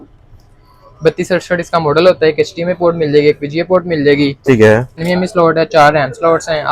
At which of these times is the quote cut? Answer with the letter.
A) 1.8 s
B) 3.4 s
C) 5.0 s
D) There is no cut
C